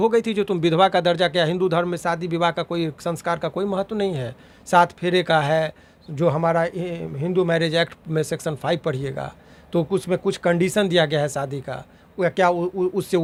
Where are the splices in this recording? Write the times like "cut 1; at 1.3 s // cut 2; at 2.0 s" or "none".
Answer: none